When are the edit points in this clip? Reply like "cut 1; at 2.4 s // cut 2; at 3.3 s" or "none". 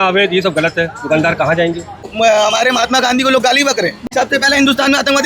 cut 1; at 2.1 s // cut 2; at 4.0 s